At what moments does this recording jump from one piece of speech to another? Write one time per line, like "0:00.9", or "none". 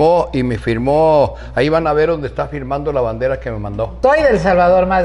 0:03.9